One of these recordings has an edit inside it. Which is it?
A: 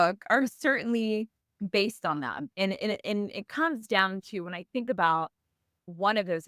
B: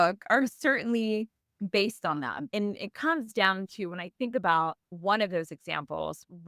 B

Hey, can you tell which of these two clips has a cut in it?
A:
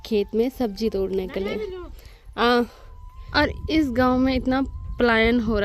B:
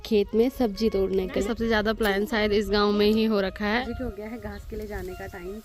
B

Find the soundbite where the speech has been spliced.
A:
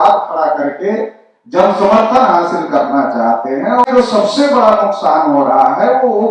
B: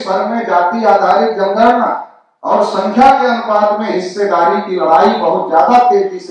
A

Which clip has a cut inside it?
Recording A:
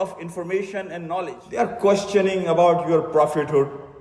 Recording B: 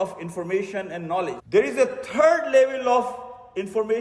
A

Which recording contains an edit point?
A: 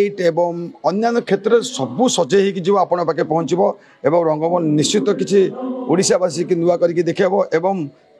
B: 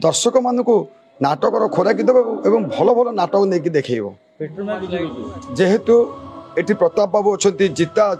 B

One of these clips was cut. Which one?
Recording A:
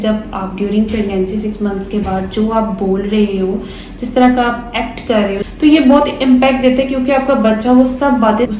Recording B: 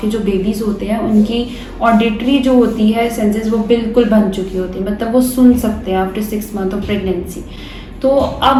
A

